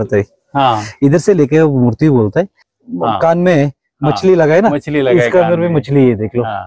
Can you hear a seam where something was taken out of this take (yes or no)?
yes